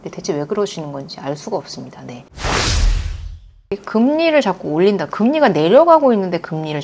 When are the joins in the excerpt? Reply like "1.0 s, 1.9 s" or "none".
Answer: 2.4 s, 3.5 s